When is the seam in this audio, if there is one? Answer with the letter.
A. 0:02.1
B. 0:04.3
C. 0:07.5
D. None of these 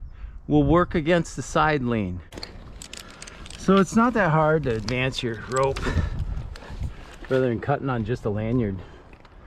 A